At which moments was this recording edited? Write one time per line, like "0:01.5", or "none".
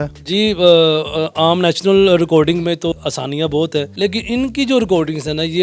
0:02.9
0:03.9